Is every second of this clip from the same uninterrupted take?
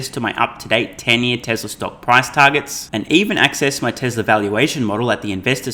yes; 0 cuts

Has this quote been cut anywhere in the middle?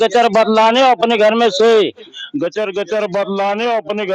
no; 0 cuts

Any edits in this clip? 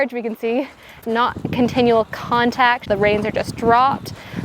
yes; 2 cuts; at 1.0 s, 2.8 s

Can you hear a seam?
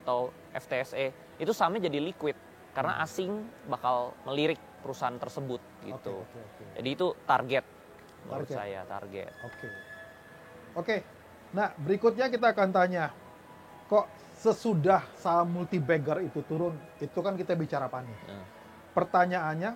no; 0 cuts

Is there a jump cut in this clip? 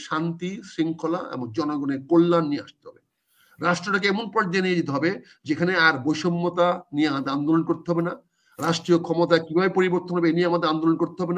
no; 0 cuts

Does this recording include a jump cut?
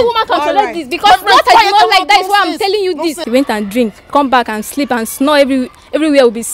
yes; 1 cut; at 3.2 s

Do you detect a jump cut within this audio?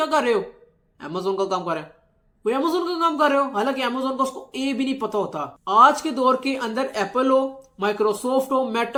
no; 0 cuts

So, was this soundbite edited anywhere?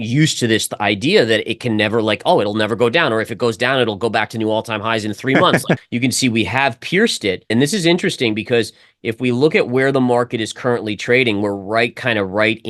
yes; 2 cuts; at 5.8 s, 7.5 s

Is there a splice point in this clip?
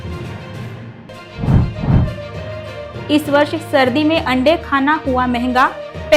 yes; 1 cut; at 0.9 s

